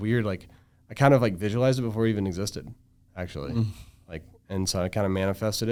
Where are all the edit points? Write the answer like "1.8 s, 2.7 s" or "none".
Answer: none